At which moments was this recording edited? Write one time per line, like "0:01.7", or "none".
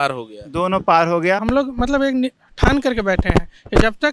0:01.4

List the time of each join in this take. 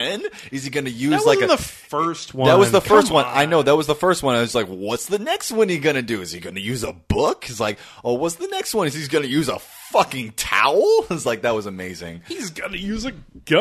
none

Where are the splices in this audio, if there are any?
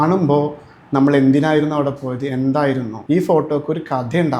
0:02.9

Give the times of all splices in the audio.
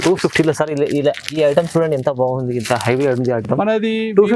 none

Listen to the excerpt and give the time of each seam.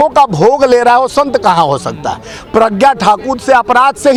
none

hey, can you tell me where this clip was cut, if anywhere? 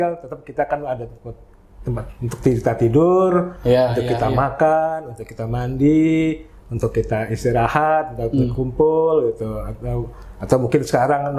none

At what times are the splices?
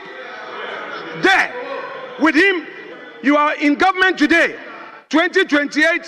0:02.8

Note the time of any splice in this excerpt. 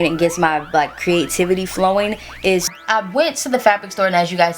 0:02.7

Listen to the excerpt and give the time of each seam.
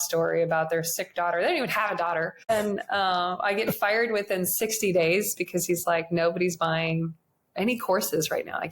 0:02.5

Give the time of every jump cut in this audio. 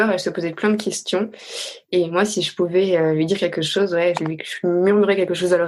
none

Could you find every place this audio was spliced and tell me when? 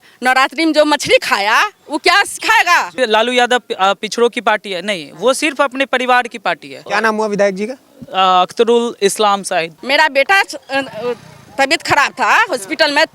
0:02.9
0:06.9
0:09.8

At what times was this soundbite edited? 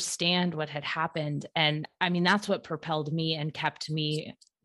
0:01.9

